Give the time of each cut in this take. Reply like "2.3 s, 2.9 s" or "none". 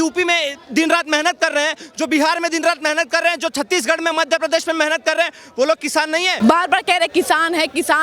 6.3 s

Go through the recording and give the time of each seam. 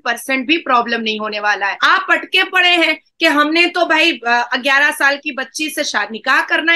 1.8 s

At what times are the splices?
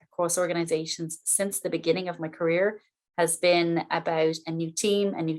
none

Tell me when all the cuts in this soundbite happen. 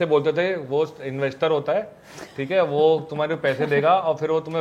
none

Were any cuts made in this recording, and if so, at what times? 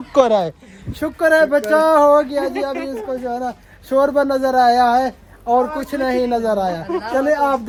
none

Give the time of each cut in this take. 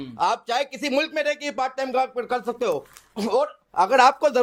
none

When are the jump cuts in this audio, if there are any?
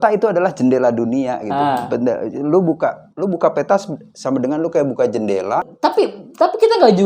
5.7 s

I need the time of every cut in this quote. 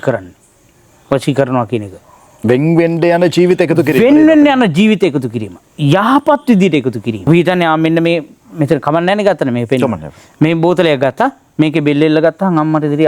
7.3 s

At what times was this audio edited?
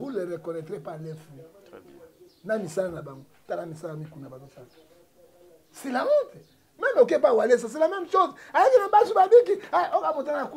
none

